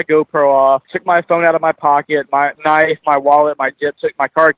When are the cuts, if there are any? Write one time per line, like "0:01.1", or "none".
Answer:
0:00.9
0:02.5